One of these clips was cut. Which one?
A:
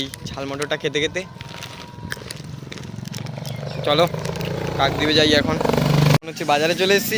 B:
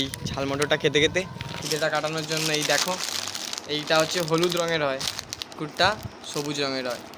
B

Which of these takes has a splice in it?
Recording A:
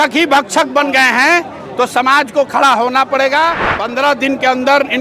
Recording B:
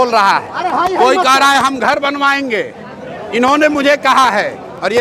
A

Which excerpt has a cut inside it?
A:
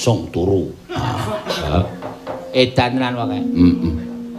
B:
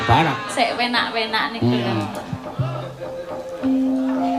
A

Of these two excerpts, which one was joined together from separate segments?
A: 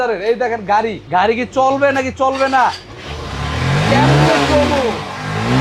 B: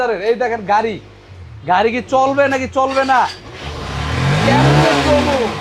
A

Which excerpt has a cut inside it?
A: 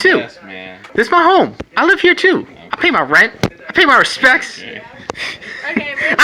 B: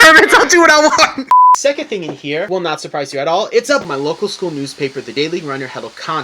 B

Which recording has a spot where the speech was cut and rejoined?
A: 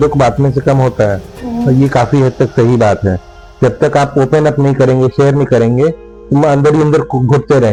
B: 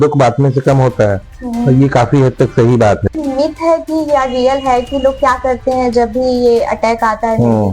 B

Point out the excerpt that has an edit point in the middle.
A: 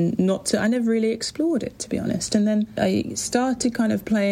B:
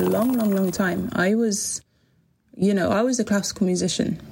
A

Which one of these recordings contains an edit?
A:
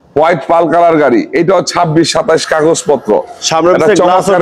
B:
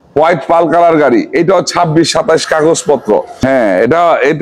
B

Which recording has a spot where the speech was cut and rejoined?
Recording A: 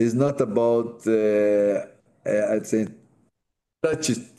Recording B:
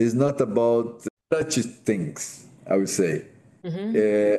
B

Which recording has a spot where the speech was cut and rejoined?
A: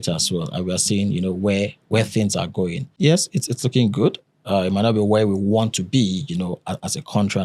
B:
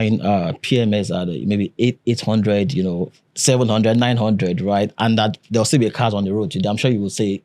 A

